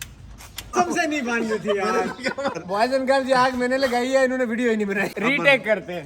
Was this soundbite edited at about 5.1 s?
yes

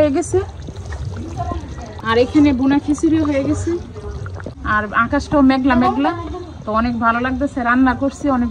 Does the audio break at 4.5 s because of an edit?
yes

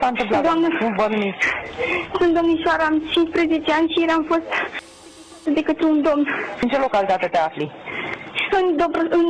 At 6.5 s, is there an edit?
yes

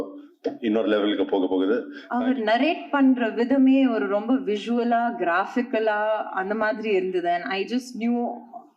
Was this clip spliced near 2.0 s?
yes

